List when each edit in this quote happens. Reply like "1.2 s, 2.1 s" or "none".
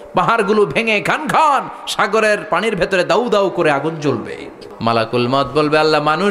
4.6 s